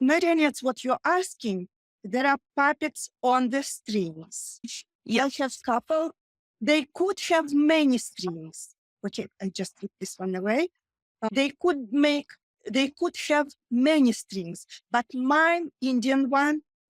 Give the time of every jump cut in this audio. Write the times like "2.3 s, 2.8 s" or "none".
6.3 s